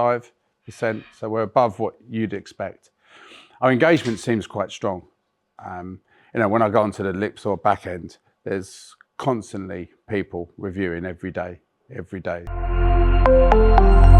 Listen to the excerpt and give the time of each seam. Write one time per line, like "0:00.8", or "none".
0:12.5